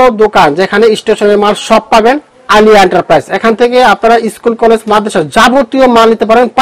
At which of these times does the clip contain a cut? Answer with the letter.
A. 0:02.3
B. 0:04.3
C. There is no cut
C